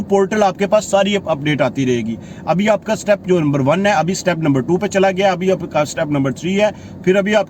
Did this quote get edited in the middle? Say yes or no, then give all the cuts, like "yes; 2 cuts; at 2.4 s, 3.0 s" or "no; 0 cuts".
no; 0 cuts